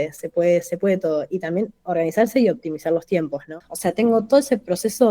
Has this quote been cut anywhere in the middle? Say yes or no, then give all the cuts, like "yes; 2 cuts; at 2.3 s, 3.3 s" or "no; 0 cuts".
yes; 1 cut; at 3.4 s